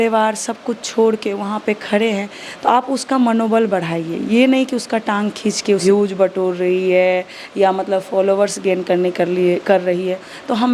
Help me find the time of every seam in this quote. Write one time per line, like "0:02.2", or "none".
0:05.8